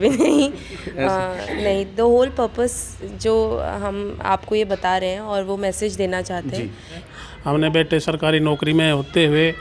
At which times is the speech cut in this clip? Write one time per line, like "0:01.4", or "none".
0:07.1